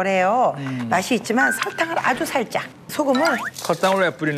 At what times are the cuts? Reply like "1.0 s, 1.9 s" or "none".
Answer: 2.8 s

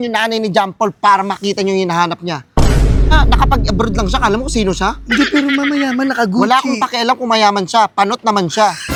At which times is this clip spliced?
none

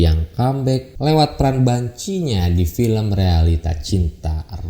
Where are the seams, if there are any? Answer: 0.9 s

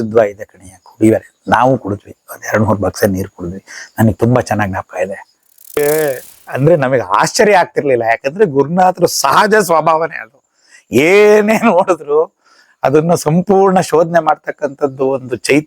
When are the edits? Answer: 5.8 s

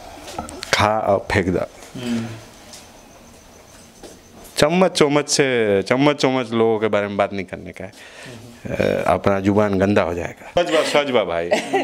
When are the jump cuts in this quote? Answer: 10.6 s

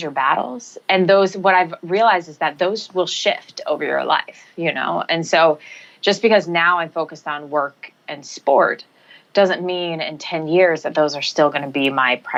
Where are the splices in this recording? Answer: none

